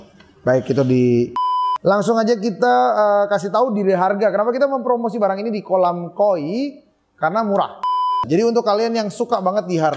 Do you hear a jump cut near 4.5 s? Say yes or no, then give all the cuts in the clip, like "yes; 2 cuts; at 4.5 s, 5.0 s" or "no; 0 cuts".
no; 2 cuts; at 1.5 s, 7.8 s